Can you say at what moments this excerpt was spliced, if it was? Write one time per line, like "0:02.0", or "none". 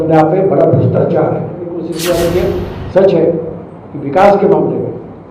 0:01.9